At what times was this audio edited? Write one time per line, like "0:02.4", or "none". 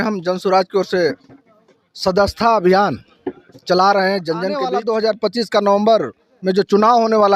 0:04.6